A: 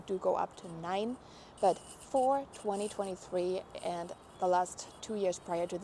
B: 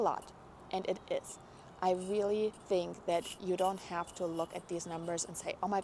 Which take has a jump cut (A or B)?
A